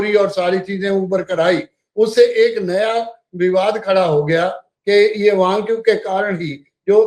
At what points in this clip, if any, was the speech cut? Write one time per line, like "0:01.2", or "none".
0:04.7